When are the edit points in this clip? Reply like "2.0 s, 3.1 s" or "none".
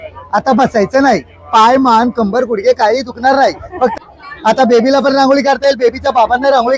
3.9 s